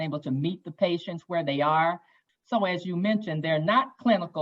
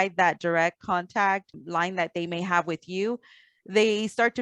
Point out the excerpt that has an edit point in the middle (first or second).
first